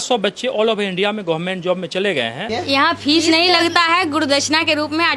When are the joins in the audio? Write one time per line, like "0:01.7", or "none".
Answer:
0:02.4